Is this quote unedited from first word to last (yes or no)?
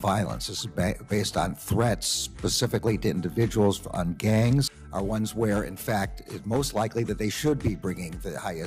yes